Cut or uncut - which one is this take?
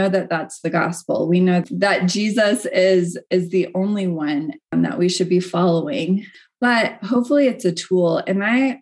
cut